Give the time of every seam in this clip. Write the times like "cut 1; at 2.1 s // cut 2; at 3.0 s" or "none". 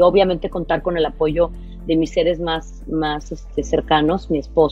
none

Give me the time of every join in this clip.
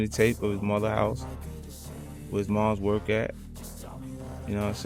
none

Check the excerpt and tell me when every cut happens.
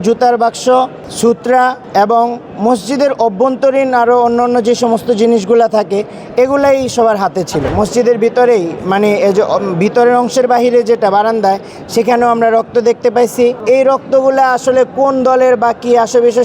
cut 1; at 1.5 s // cut 2; at 7.7 s // cut 3; at 13.6 s

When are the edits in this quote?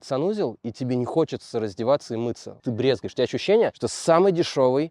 cut 1; at 2.6 s

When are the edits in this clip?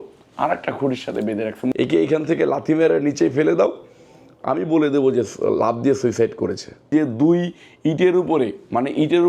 cut 1; at 1.7 s // cut 2; at 6.9 s

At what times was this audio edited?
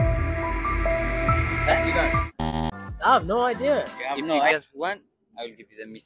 cut 1; at 4.5 s

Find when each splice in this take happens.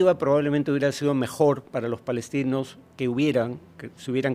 none

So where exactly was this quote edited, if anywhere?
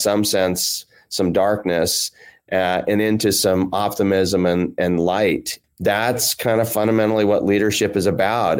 cut 1; at 5.5 s

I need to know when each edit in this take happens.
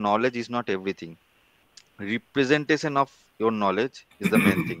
none

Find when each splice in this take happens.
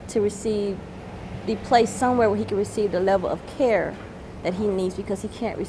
none

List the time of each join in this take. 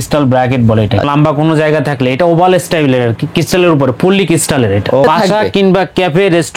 cut 1; at 1.1 s // cut 2; at 5.0 s

